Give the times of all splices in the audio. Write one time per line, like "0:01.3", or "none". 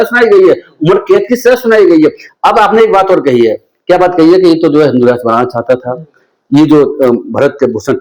none